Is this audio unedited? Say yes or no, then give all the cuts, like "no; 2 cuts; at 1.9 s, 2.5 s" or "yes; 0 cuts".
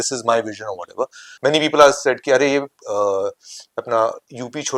no; 1 cut; at 1.2 s